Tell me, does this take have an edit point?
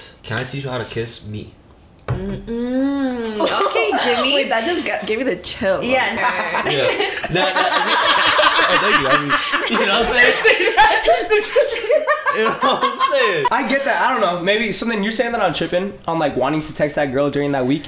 yes; 2 cuts; at 6.2 s, 13.5 s

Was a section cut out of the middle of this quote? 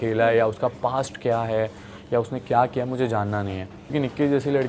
yes; 1 cut; at 3.7 s

